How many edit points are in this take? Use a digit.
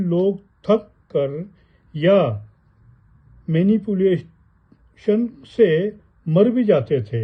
0